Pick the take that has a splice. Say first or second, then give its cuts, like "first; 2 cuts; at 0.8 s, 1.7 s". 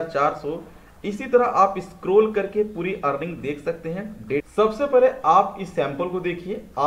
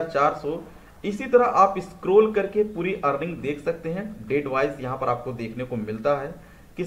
first; 1 cut; at 4.5 s